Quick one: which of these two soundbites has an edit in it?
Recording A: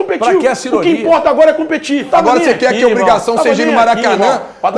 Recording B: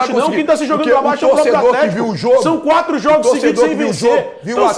A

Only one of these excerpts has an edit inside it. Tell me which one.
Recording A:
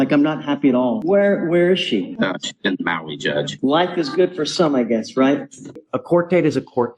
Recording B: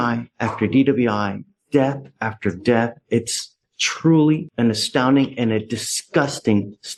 A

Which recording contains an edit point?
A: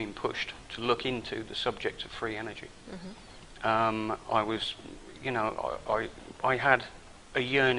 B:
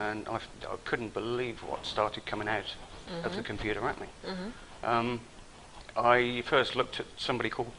B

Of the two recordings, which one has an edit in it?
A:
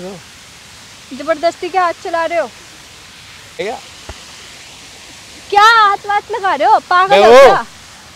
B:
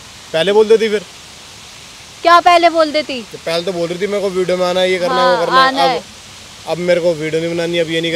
A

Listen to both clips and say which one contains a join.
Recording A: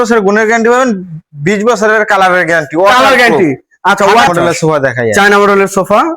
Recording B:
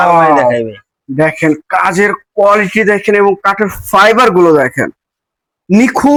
A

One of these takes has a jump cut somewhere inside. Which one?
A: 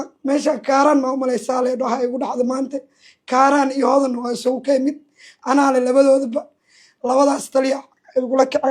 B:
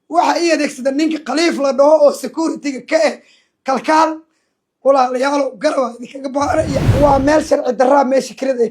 B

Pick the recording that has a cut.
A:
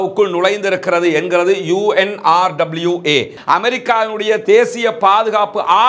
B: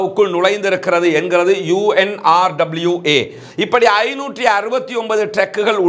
A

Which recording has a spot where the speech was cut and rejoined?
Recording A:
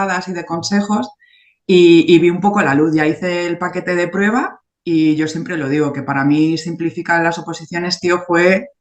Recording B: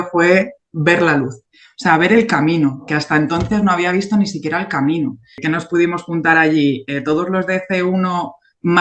B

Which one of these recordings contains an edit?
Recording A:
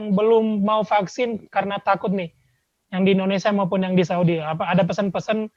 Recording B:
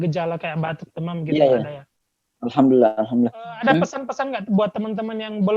B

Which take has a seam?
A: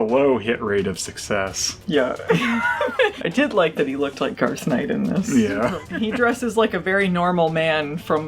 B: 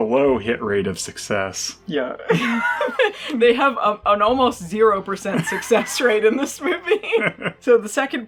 A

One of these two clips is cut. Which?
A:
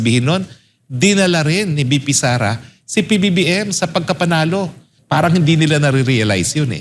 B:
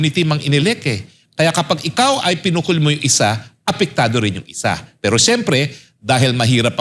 A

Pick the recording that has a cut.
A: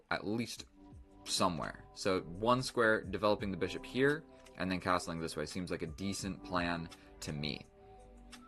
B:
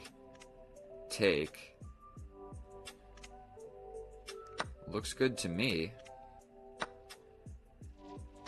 A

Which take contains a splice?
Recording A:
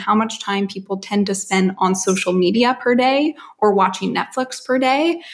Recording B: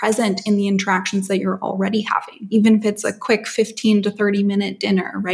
B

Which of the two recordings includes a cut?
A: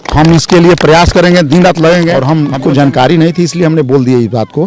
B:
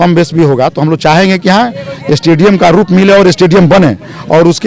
A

